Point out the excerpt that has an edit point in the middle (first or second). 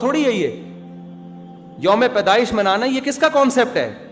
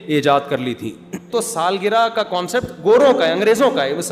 second